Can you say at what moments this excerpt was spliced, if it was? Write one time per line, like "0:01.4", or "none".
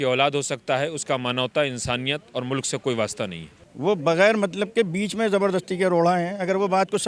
0:03.5